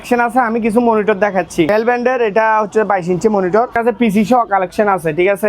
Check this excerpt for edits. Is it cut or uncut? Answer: cut